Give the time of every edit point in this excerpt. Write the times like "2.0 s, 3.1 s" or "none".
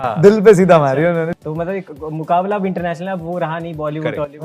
1.4 s